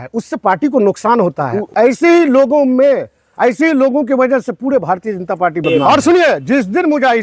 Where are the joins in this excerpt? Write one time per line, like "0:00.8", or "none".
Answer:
0:01.5
0:05.7